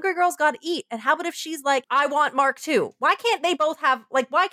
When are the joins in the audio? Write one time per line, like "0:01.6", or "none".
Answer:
0:01.8